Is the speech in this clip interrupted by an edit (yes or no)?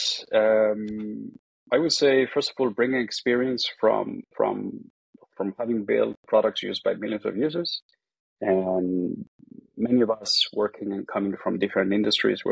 no